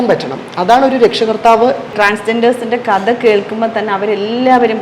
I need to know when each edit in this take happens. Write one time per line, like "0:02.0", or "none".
0:01.9